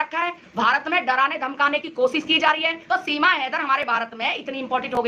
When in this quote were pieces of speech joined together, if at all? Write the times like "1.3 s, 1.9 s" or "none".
2.8 s